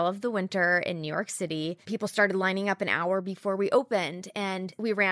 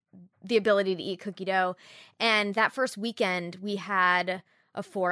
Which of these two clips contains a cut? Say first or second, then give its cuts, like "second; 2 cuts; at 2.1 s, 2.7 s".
first; 1 cut; at 1.8 s